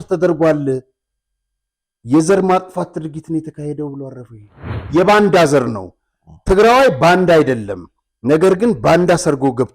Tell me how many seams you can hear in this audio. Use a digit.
1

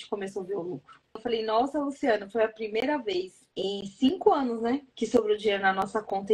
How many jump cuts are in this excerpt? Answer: 0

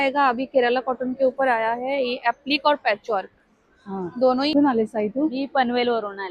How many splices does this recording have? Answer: 1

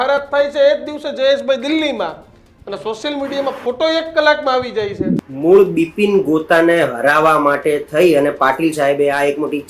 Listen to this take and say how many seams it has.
1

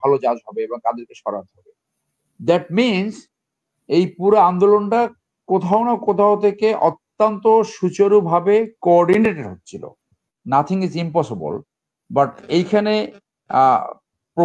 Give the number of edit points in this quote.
1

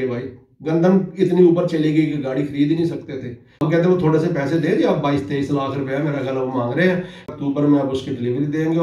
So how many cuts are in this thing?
2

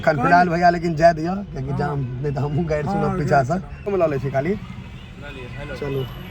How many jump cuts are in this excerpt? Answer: 1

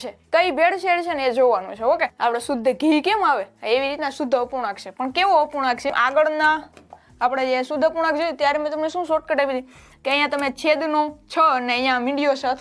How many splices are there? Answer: 2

